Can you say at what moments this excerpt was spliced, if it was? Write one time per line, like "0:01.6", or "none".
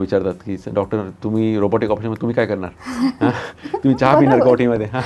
none